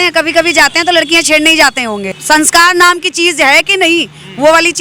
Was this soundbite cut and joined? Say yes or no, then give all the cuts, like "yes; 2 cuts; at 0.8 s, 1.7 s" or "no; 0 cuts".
no; 0 cuts